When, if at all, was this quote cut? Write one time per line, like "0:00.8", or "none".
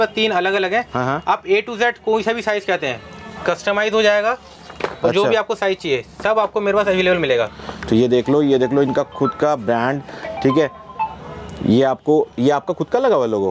none